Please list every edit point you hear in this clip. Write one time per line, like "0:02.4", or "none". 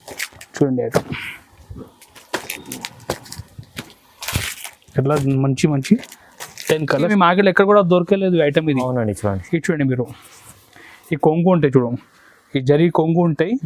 0:07.1